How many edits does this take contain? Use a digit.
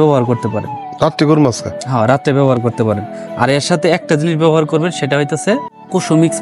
0